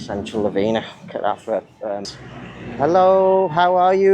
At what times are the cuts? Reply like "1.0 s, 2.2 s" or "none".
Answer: 2.1 s